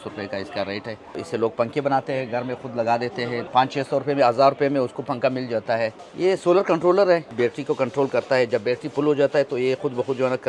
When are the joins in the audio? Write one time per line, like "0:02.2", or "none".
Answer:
0:01.2
0:03.4
0:06.0
0:07.3